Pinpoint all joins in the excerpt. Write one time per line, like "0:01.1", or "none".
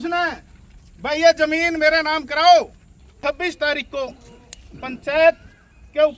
0:03.2